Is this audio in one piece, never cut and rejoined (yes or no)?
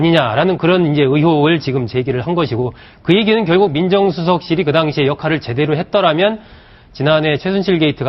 yes